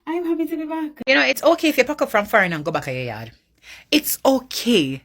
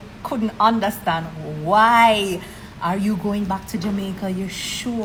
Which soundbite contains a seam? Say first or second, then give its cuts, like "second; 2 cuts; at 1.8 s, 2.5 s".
first; 1 cut; at 1.0 s